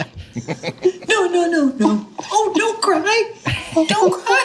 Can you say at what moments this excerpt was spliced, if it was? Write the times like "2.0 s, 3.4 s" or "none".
none